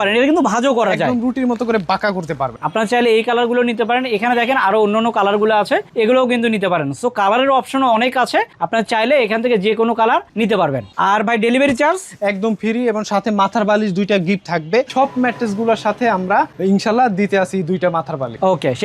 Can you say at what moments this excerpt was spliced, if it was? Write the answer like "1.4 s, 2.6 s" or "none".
2.6 s, 10.9 s, 14.9 s